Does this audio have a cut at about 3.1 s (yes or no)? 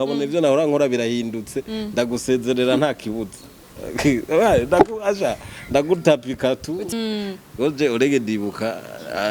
no